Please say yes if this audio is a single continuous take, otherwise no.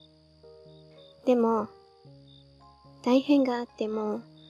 yes